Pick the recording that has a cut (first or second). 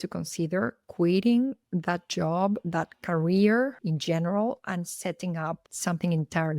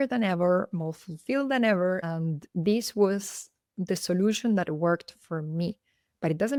first